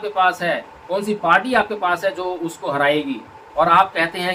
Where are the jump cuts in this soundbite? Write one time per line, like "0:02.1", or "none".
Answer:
none